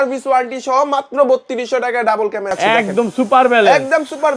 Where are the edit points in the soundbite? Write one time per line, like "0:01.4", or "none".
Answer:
0:02.5